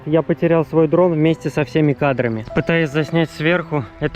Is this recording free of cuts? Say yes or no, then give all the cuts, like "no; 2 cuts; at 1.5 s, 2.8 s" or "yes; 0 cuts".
no; 1 cut; at 2.4 s